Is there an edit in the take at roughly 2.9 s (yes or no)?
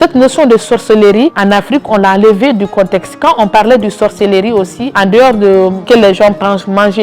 no